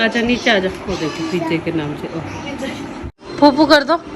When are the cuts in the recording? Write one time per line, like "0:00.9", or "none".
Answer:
0:03.1